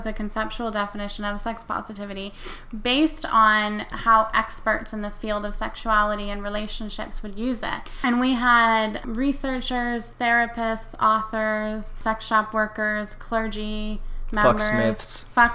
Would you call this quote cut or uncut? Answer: cut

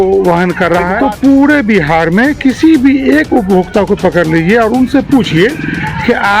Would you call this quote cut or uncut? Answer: cut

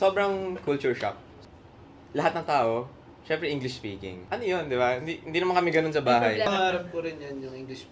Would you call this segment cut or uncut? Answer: cut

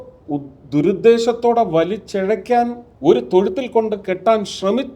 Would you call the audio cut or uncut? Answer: cut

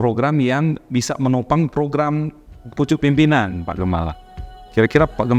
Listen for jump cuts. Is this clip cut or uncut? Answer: uncut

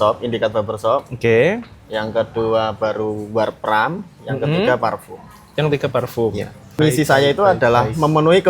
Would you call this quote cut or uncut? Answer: cut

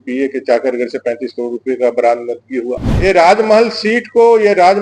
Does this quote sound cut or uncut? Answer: cut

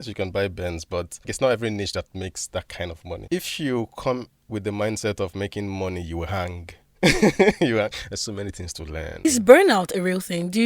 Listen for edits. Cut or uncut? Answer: cut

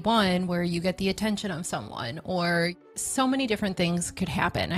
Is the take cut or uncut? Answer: cut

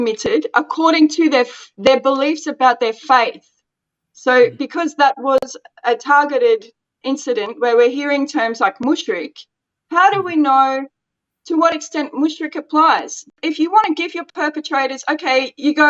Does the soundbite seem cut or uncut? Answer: cut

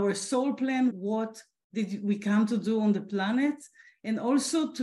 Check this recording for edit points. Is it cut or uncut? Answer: cut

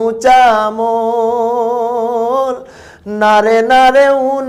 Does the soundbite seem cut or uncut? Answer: uncut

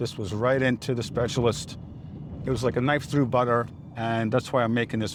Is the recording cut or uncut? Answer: uncut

